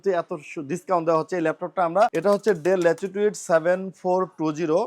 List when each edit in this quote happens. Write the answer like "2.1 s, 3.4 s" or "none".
2.2 s